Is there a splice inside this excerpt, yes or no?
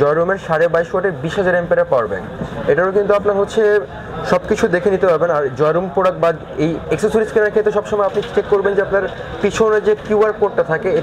no